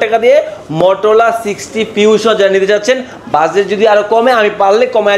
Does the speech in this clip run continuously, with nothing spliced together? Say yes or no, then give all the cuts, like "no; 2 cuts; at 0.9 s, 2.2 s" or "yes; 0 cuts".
yes; 0 cuts